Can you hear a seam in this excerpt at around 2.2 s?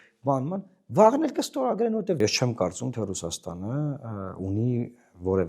yes; 1 cut; at 2.2 s

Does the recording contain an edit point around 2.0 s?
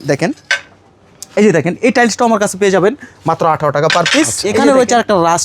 no; 1 cut; at 4.4 s

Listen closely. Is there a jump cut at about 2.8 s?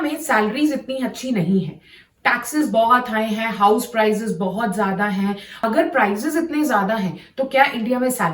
no; 1 cut; at 5.5 s

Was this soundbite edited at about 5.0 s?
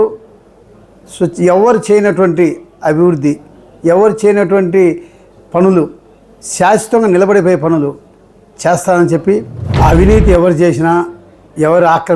no; 1 cut; at 9.6 s

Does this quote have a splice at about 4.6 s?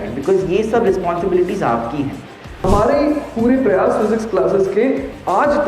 no; 1 cut; at 2.6 s

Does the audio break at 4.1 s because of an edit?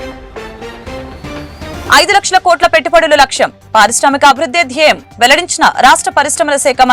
no; 1 cut; at 1.7 s

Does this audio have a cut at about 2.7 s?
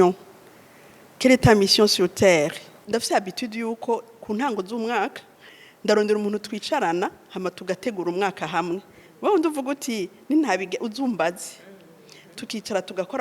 yes; 1 cut; at 2.7 s

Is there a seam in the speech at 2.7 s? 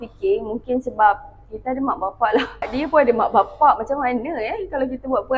yes; 1 cut; at 2.7 s

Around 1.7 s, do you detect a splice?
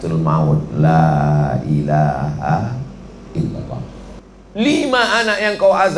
no; 1 cut; at 4.1 s

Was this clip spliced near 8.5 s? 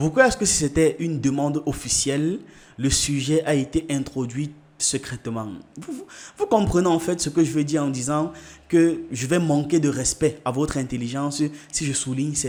no; 0 cuts

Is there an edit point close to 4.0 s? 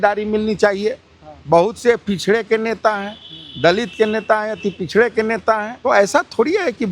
no; 1 cut; at 5.7 s

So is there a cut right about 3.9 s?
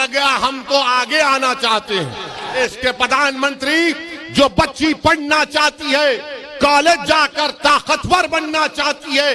no; 1 cut; at 2.6 s

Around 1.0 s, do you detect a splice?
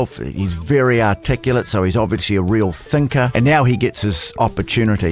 no; 1 cut; at 3.3 s

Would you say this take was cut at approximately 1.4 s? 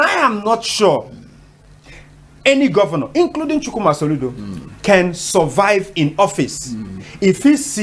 no; 0 cuts

